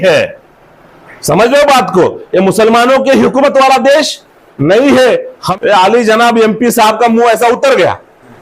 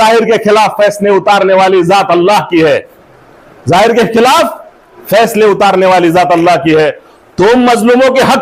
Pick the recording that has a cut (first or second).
first